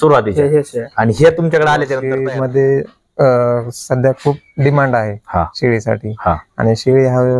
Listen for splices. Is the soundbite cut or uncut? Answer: cut